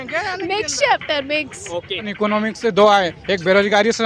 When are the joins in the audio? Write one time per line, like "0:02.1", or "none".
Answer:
0:02.1